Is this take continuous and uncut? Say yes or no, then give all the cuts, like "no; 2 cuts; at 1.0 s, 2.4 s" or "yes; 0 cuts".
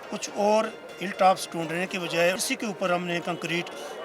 no; 1 cut; at 2.4 s